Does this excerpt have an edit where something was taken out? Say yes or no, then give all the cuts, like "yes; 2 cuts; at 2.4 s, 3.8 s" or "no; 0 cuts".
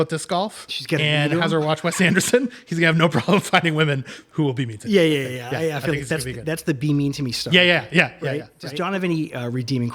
yes; 1 cut; at 8.7 s